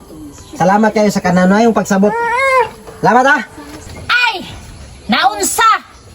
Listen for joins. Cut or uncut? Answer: cut